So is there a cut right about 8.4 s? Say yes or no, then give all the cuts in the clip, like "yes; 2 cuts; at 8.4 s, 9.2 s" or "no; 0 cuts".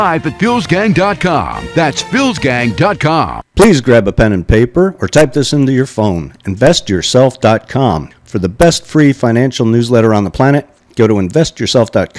no; 1 cut; at 3.4 s